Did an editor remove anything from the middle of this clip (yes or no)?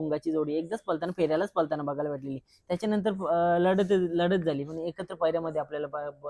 no